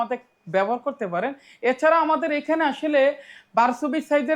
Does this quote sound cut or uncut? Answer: uncut